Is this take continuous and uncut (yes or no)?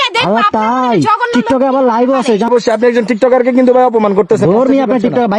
yes